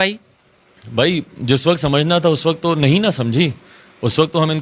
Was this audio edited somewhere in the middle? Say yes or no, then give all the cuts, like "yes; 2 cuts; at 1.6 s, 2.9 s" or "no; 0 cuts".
no; 0 cuts